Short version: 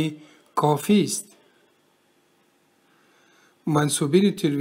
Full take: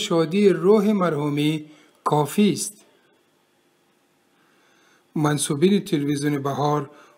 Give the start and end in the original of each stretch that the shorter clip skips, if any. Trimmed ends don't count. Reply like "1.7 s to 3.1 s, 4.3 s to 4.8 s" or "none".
none